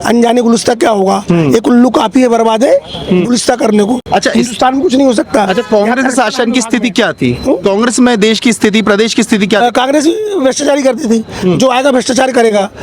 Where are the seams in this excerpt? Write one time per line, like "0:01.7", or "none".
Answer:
none